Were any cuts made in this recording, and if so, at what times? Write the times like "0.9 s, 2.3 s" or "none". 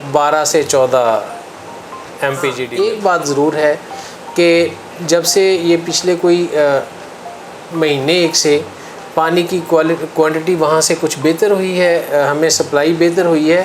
2.6 s